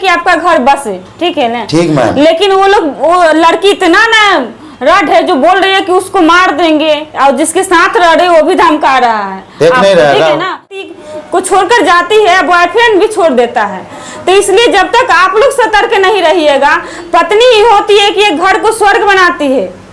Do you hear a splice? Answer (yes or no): yes